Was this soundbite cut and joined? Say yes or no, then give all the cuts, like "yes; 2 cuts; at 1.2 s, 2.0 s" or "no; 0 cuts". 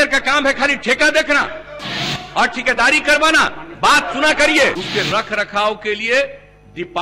yes; 1 cut; at 4.8 s